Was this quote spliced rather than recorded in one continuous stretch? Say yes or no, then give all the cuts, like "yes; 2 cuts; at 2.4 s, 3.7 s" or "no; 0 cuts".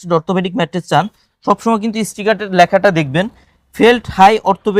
no; 0 cuts